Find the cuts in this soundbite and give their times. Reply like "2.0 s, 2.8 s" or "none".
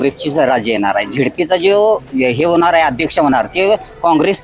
none